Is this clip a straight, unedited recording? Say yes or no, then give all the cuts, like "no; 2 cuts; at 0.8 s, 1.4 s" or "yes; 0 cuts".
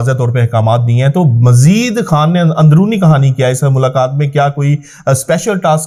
yes; 0 cuts